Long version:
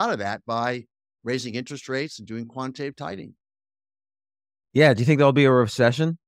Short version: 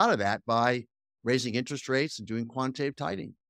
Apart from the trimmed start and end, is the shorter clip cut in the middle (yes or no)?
no